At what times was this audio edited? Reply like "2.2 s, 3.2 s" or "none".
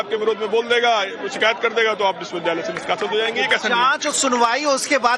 none